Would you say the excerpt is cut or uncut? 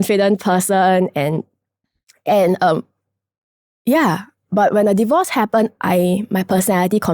uncut